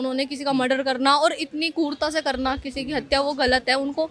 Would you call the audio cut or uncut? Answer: uncut